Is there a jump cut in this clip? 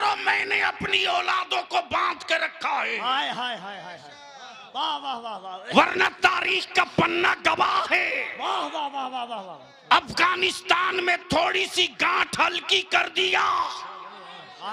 no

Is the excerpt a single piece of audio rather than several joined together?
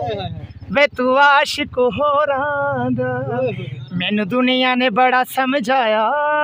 yes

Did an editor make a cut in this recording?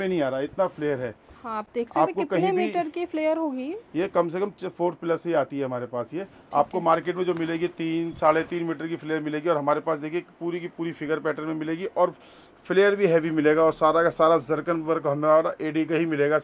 no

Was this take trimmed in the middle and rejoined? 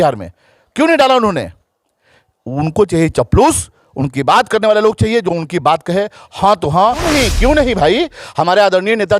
yes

